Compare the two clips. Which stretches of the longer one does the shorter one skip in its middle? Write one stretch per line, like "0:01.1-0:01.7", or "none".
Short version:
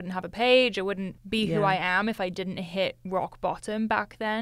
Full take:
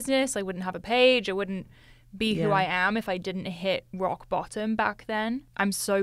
0:01.6-0:02.0

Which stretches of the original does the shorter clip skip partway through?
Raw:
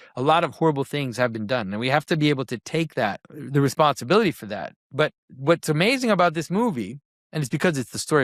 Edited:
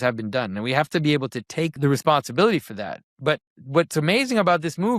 0:02.9-0:03.5

